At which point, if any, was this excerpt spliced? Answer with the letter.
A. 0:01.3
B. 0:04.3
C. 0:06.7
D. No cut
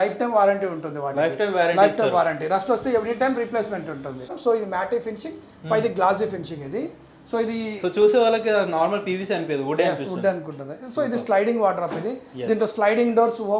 B